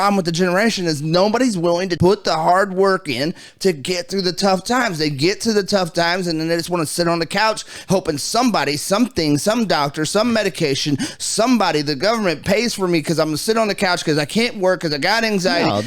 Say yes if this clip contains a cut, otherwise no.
yes